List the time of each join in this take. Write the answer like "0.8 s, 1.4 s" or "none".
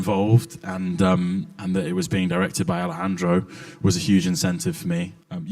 2.3 s